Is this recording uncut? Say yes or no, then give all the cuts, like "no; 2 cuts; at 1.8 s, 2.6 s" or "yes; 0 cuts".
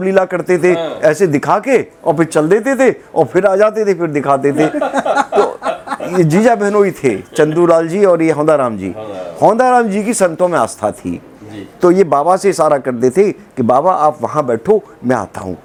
yes; 0 cuts